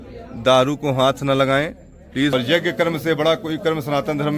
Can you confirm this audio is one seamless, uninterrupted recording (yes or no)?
no